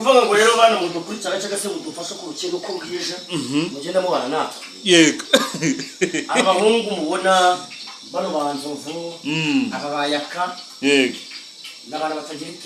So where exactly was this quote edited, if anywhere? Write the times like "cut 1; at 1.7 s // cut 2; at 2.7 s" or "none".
none